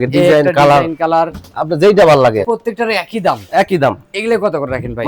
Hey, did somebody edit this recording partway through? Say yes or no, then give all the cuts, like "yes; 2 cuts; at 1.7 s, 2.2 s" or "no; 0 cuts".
yes; 1 cut; at 2.5 s